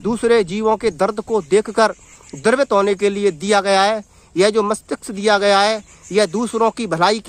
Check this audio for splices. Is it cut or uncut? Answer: uncut